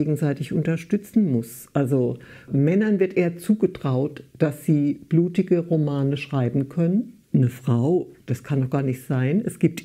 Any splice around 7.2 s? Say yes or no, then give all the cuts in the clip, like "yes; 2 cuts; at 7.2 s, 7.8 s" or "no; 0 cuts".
yes; 1 cut; at 7.2 s